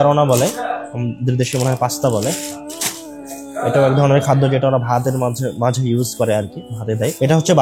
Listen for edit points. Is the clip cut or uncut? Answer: uncut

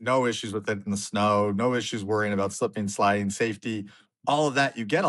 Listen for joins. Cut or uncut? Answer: uncut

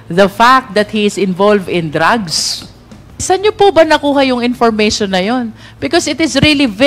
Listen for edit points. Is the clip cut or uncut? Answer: cut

